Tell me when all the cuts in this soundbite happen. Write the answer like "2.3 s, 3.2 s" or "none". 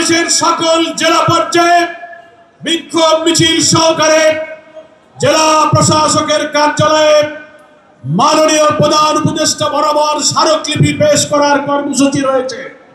none